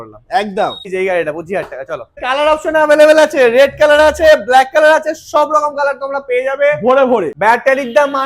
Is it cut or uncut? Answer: cut